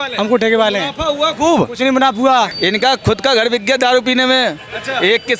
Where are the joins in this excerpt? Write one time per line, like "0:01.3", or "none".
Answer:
0:02.5